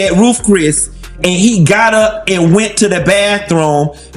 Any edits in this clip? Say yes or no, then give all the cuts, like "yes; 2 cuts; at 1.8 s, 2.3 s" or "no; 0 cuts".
no; 0 cuts